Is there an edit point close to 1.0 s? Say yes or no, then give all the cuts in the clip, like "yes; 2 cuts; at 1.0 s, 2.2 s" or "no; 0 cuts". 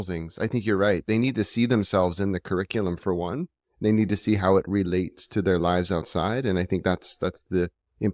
no; 0 cuts